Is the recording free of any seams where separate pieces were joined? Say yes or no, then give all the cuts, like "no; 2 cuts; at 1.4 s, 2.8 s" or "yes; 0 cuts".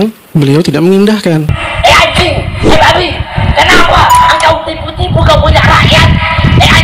no; 1 cut; at 1.5 s